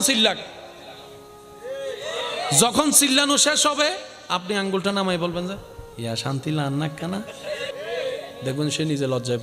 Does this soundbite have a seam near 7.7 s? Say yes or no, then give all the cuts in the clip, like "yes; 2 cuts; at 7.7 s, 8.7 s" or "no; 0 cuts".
yes; 1 cut; at 7.7 s